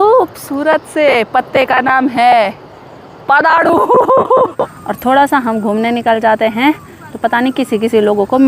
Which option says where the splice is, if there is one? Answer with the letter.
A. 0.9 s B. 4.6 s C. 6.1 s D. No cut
B